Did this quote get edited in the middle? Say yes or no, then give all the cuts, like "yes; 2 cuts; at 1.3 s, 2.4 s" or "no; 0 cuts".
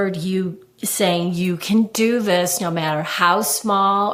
no; 0 cuts